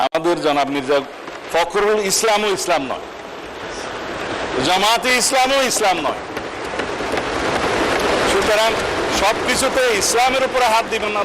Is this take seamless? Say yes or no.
yes